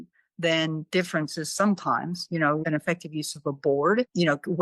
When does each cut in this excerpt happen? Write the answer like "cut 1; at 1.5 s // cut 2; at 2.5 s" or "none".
cut 1; at 2.6 s